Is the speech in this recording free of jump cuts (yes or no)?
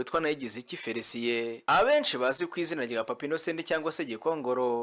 yes